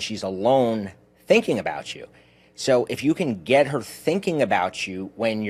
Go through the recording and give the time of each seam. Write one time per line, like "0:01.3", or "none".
none